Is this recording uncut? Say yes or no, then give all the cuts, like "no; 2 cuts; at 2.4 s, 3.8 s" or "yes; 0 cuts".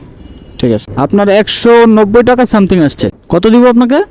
no; 2 cuts; at 0.9 s, 3.1 s